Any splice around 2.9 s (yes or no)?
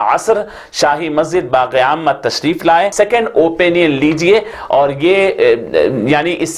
yes